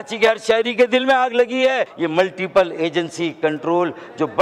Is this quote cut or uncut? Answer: cut